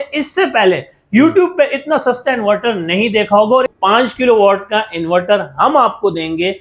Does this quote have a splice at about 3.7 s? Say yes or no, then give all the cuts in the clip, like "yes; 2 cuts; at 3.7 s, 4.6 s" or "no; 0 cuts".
yes; 1 cut; at 3.7 s